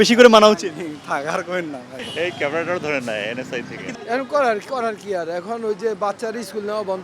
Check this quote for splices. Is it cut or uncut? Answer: cut